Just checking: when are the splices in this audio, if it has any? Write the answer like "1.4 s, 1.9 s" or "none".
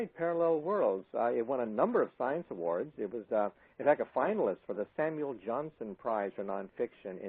2.1 s